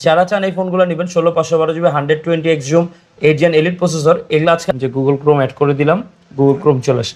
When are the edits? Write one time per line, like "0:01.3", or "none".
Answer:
0:04.6